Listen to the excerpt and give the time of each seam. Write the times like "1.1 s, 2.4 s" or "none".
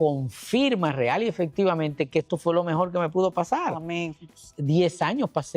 4.2 s